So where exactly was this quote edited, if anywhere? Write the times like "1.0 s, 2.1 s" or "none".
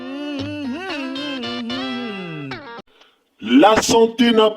2.8 s